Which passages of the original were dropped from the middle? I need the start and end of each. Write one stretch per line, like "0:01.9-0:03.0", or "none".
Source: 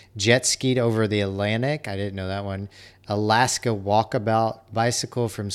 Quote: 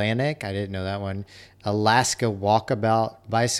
none

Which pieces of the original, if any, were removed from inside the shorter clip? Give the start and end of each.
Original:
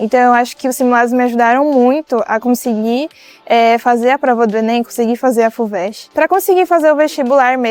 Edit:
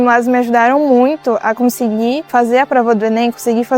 0:03.1-0:03.8

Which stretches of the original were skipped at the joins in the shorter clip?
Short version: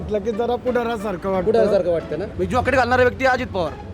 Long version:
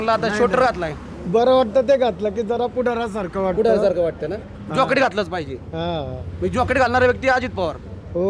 0:04.4-0:06.3

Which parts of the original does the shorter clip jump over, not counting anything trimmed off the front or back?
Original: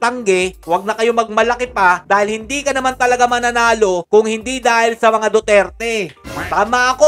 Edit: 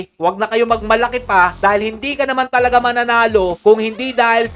none

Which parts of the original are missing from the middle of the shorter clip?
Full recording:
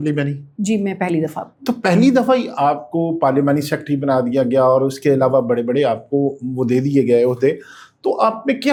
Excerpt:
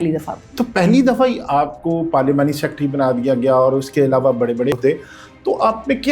0:05.8-0:07.3

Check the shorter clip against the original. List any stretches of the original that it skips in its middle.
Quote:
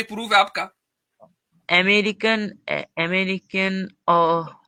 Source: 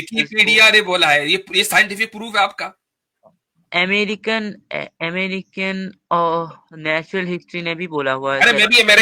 none

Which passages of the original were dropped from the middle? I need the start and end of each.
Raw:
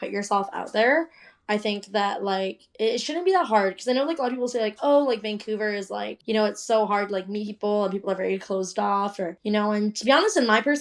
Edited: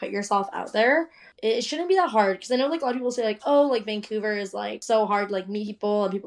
0:01.2-0:02.6
0:06.2-0:06.6

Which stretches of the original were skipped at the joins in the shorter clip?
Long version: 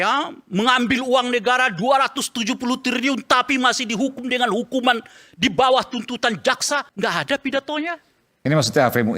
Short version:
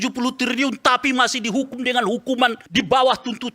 0:05.1-0:05.3

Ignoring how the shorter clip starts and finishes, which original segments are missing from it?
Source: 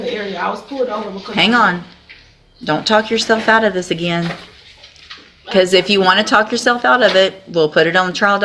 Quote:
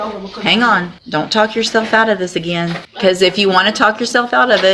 0:01.9-0:02.5
0:04.4-0:05.4

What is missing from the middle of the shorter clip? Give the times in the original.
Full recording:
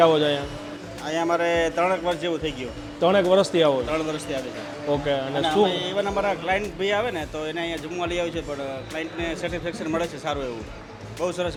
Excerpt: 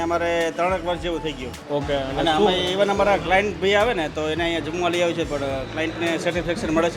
0:02.7-0:04.7

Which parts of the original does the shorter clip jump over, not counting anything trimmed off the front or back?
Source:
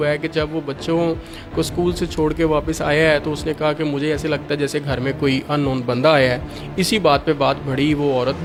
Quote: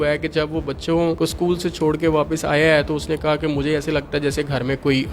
0:01.2-0:01.5

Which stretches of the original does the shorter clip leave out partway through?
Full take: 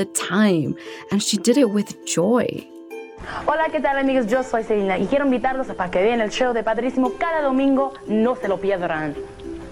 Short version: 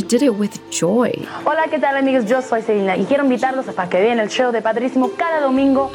0:02.6-0:03.3

